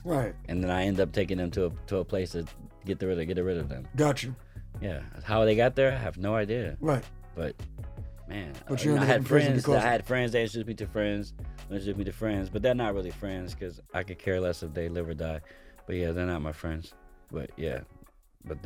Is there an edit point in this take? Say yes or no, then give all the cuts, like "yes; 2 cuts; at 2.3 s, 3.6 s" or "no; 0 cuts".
no; 0 cuts